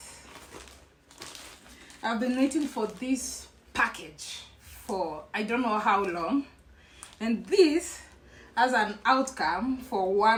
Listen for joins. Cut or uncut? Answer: uncut